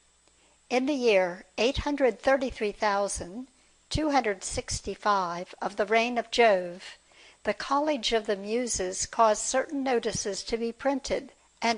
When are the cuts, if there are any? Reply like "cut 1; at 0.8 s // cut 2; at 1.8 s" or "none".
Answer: cut 1; at 1.1 s